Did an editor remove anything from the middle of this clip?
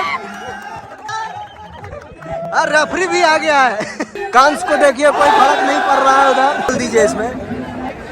yes; 1 cut; at 1.0 s

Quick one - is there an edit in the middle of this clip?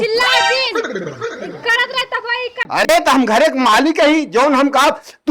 yes; 1 cut; at 2.6 s

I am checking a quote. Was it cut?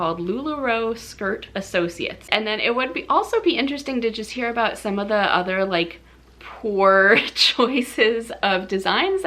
yes; 1 cut; at 2.3 s

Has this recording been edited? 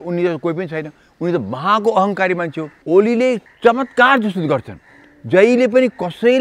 yes; 2 cuts; at 2.7 s, 3.4 s

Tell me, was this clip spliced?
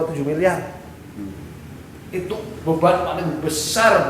no; 0 cuts

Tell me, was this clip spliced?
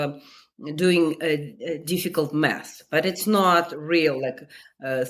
no; 0 cuts

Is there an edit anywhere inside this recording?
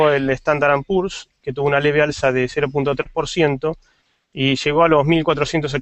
no; 0 cuts

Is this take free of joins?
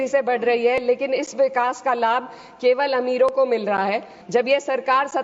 no; 1 cut; at 4.1 s

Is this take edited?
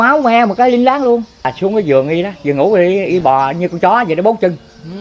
yes; 1 cut; at 1.5 s

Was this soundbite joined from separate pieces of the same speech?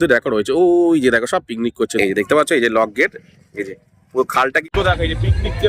yes; 2 cuts; at 1.9 s, 4.6 s

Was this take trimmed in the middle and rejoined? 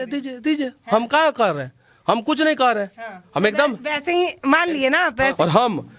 no; 0 cuts

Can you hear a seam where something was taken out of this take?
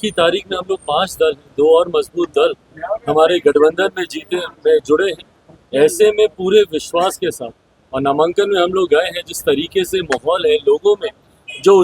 no; 0 cuts

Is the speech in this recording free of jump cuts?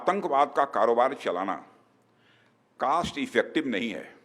yes; 0 cuts

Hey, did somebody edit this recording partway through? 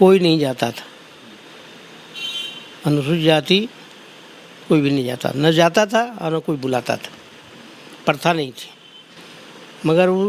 no; 0 cuts

